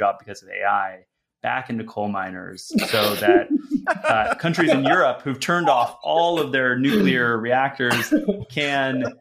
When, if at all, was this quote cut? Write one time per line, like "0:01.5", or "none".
none

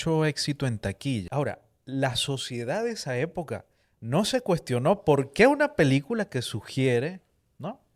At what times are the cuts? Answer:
0:01.2

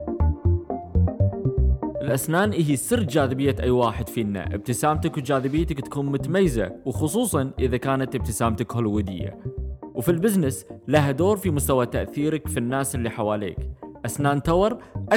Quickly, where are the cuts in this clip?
0:02.0

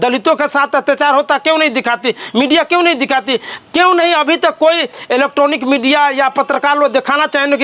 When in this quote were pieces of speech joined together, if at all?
none

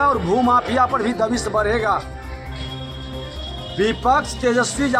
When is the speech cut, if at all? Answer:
0:02.3
0:03.7

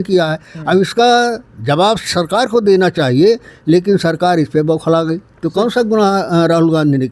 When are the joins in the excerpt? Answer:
0:05.3

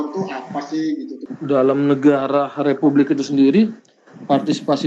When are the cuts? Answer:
0:01.2

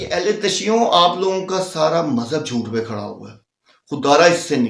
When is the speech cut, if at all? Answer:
none

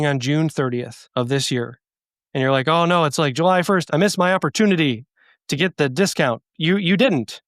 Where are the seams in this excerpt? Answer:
0:01.0
0:03.8
0:06.5

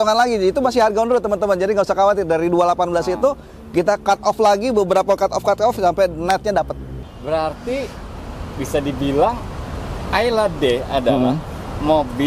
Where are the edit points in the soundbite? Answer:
0:07.0

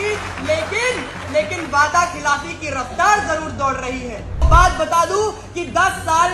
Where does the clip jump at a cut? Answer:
0:04.5

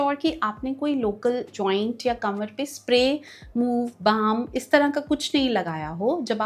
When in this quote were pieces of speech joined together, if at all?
none

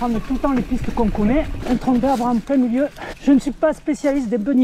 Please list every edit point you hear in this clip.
0:01.6
0:03.1

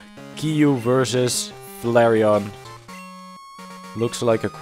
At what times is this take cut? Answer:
0:02.7

